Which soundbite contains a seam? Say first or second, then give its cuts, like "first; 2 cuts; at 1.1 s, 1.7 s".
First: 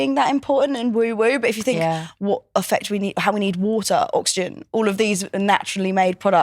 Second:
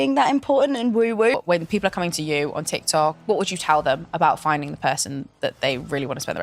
second; 2 cuts; at 1.3 s, 3.2 s